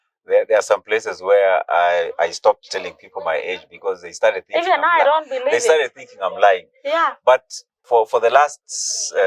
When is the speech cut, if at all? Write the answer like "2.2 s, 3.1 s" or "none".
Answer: 7.8 s